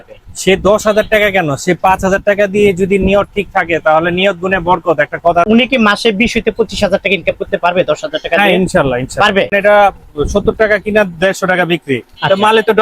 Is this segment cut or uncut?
cut